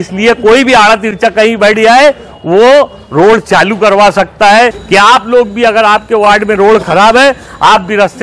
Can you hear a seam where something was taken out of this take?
yes; 1 cut; at 5.0 s

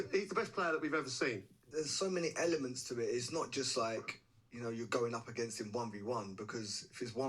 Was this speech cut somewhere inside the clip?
yes; 1 cut; at 1.6 s

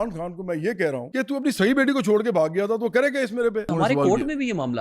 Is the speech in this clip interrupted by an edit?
yes; 2 cuts; at 1.1 s, 3.7 s

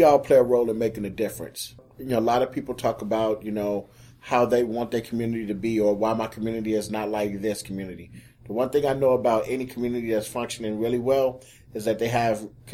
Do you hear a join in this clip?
yes; 1 cut; at 1.9 s

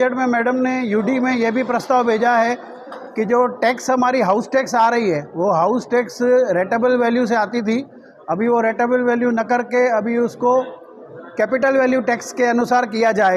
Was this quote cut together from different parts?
no; 0 cuts

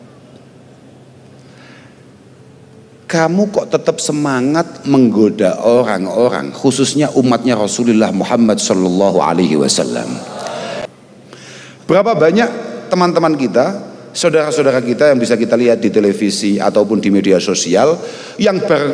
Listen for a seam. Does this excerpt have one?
yes; 1 cut; at 10.8 s

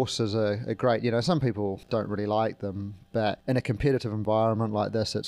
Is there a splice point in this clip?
yes; 2 cuts; at 1.8 s, 3.4 s

